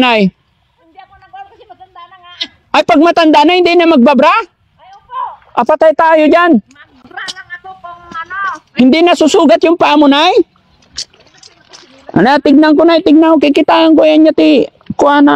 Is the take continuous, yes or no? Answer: yes